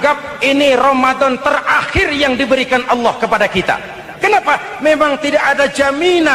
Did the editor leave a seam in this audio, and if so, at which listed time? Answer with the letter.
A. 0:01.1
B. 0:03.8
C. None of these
C